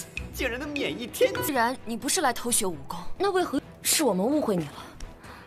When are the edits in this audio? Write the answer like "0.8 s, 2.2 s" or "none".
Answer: 1.4 s